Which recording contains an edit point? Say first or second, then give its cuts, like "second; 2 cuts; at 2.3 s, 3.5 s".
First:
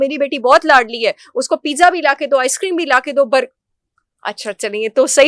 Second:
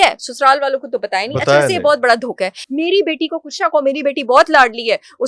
second; 1 cut; at 2.6 s